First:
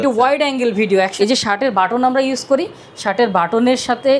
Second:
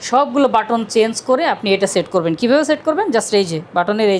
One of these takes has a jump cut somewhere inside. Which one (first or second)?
first